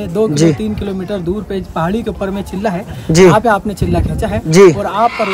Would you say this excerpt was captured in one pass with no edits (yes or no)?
yes